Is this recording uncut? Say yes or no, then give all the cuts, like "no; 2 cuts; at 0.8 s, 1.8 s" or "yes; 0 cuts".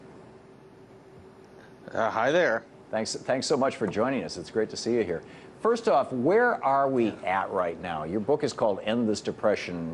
no; 1 cut; at 3.4 s